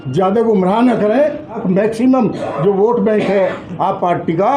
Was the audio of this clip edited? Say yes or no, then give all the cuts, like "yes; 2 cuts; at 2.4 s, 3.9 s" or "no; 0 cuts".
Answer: yes; 1 cut; at 1.5 s